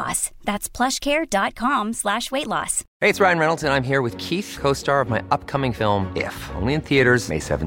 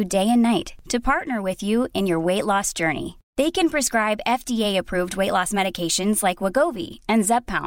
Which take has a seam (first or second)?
first